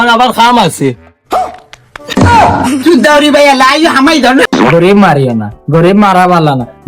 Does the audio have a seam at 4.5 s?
yes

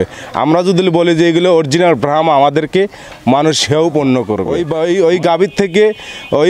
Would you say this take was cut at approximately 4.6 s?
yes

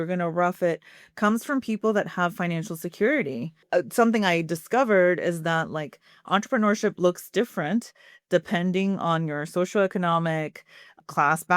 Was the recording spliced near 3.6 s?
yes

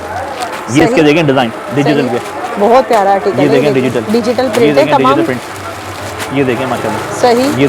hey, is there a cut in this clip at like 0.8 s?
no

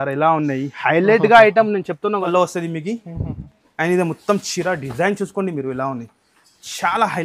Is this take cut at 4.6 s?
no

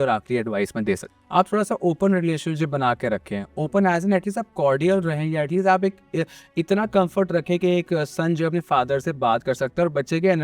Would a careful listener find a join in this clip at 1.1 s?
yes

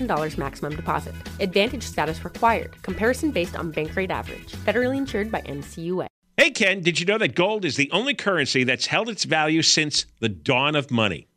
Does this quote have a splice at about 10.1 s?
no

